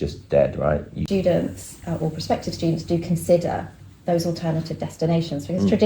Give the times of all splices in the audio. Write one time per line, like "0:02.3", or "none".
0:00.9